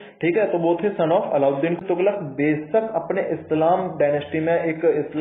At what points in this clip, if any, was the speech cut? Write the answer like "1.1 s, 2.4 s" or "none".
1.8 s

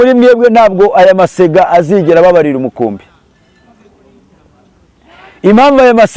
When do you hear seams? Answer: none

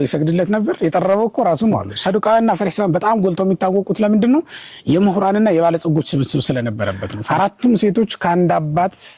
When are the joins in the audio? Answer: 1.9 s, 7.1 s

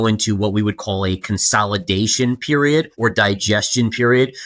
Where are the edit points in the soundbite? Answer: 2.9 s

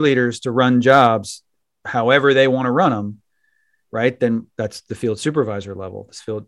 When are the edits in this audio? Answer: none

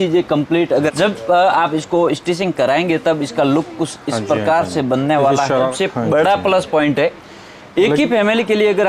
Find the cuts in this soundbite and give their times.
0.9 s, 5.7 s

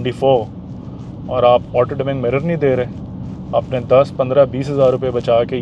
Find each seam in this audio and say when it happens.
none

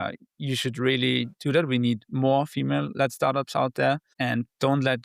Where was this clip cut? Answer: 4.1 s

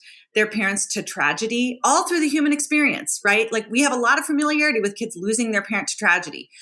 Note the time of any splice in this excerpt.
none

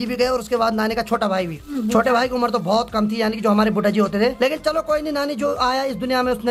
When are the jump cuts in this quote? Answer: none

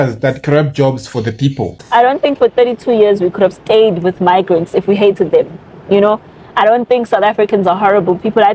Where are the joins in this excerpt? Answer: 1.8 s

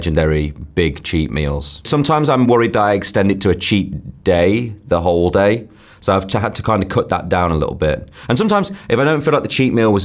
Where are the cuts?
1.9 s

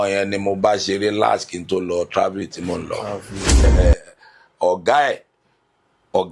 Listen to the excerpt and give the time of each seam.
3.6 s

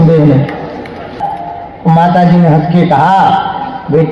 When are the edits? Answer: 1.2 s

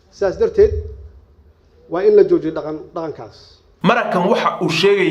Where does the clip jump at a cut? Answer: 3.6 s

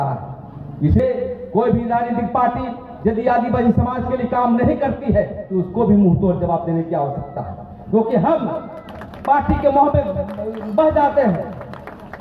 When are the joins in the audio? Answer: 1.0 s

